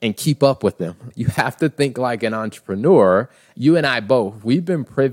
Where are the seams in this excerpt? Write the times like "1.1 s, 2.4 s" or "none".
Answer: 1.1 s, 3.5 s